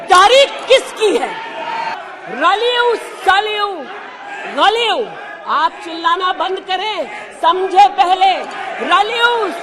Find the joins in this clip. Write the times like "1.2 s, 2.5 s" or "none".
2.0 s